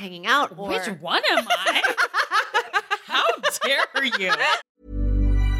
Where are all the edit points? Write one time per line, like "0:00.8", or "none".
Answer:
0:04.6